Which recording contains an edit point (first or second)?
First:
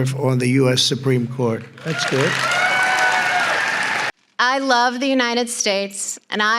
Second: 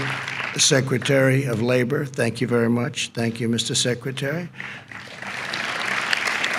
first